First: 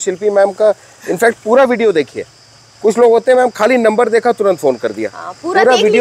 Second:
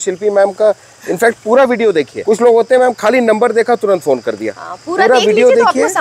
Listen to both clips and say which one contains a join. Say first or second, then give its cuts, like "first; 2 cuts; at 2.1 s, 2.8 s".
second; 1 cut; at 2.1 s